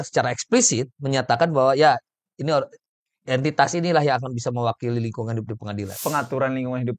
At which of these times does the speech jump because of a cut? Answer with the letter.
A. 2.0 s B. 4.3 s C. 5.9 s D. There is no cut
C